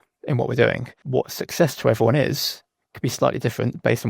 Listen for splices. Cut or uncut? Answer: cut